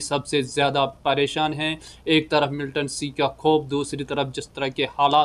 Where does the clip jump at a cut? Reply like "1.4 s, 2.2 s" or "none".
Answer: none